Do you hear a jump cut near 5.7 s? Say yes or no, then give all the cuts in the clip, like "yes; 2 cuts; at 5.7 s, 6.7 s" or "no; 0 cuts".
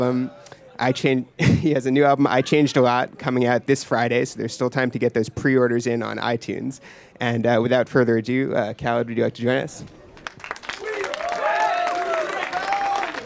no; 1 cut; at 8.7 s